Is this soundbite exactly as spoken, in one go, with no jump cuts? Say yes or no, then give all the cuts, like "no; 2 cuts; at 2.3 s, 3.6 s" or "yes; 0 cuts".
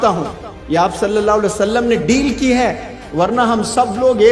yes; 0 cuts